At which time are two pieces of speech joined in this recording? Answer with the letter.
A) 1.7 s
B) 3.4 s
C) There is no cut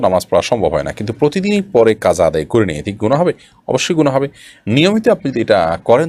C